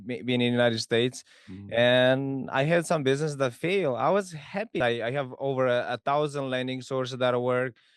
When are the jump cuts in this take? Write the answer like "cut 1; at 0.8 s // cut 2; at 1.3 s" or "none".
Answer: cut 1; at 4.8 s